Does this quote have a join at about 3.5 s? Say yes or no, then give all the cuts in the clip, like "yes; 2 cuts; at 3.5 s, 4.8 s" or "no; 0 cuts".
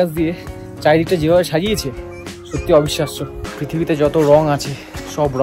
yes; 1 cut; at 3.5 s